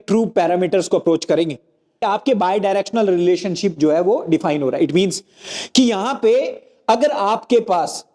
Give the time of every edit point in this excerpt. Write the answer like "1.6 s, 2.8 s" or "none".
2.0 s